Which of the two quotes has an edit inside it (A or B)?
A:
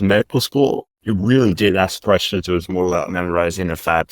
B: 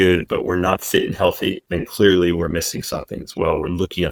A